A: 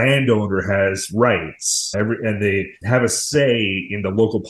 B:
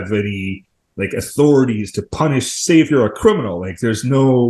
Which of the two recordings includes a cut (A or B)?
A